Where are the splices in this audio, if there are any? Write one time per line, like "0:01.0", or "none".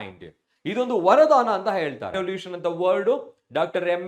0:02.1